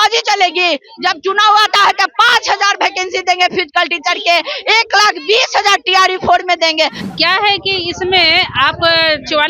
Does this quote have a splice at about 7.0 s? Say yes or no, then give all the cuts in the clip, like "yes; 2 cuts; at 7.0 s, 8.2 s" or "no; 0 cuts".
yes; 1 cut; at 7.0 s